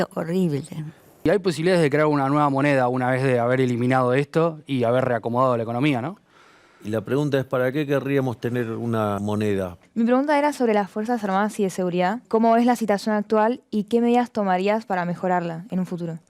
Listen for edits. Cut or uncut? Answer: cut